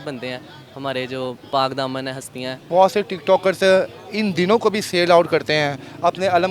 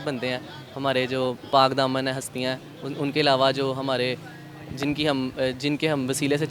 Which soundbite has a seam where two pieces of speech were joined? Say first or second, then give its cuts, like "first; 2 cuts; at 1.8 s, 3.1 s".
first; 1 cut; at 2.6 s